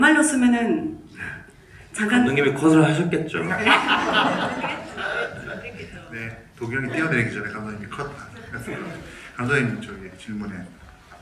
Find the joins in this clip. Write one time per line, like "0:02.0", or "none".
none